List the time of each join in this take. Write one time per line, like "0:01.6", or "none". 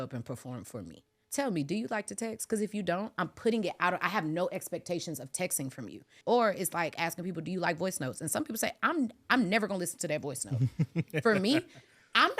0:01.1
0:06.1